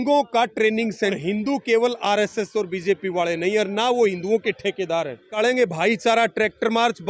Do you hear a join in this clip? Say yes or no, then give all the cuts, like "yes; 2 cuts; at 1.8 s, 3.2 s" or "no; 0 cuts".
yes; 2 cuts; at 1.2 s, 5.3 s